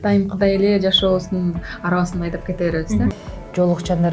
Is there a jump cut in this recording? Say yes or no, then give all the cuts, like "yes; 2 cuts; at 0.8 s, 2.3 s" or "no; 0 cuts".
yes; 1 cut; at 3.2 s